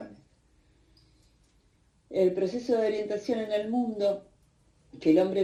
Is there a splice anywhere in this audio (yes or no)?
no